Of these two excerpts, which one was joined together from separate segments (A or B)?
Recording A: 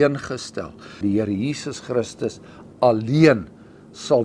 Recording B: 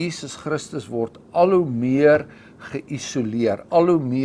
A